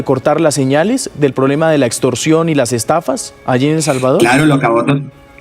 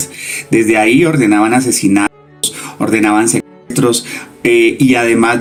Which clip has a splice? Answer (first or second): first